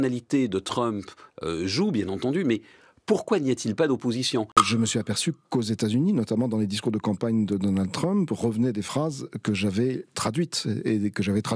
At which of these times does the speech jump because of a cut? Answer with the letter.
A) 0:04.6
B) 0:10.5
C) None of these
A